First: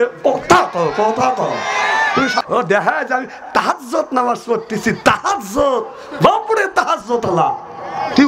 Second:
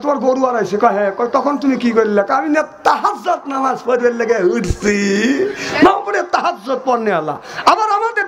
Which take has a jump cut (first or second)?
first